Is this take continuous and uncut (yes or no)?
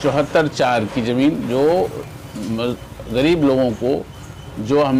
yes